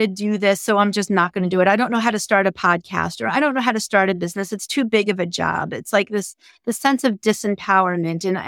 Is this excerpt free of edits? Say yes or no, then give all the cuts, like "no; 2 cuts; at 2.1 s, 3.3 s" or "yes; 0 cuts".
yes; 0 cuts